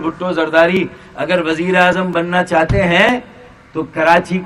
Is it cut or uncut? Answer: uncut